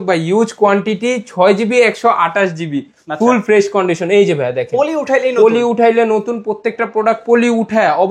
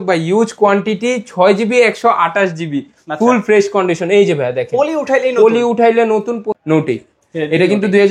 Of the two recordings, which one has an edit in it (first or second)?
second